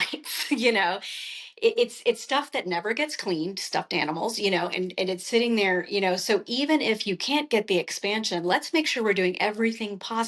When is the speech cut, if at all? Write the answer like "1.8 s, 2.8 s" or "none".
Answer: none